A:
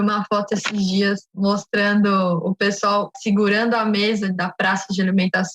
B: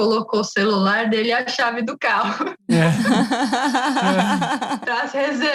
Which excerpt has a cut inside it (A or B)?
A